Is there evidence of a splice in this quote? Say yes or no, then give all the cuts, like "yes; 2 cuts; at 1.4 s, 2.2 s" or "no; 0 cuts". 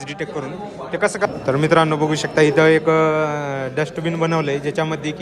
yes; 1 cut; at 1.3 s